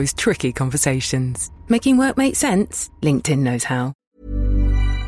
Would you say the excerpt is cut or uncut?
cut